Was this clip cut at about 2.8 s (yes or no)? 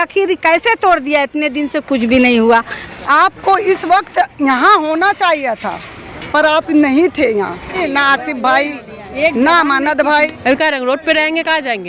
yes